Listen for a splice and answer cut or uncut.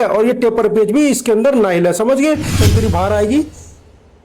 cut